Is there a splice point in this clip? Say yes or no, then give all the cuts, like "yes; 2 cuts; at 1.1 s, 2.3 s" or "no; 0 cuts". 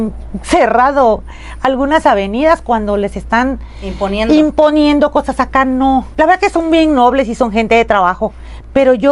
yes; 1 cut; at 6.1 s